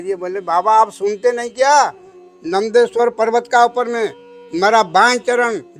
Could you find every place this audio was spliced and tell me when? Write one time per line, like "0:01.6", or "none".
none